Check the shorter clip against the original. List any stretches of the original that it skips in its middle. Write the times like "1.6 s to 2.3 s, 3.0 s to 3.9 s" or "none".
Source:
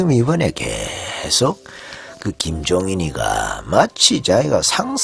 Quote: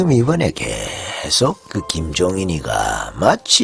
1.6 s to 2.1 s